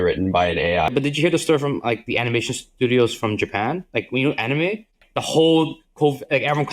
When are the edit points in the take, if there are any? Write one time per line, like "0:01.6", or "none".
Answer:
0:00.9
0:05.0

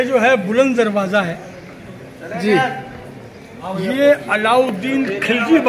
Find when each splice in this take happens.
none

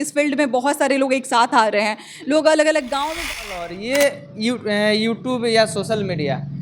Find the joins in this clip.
0:03.6

